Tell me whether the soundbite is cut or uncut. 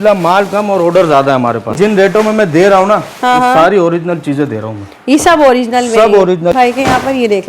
cut